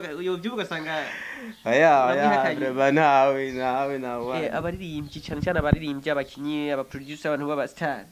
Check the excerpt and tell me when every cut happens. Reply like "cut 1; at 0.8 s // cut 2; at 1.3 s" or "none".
none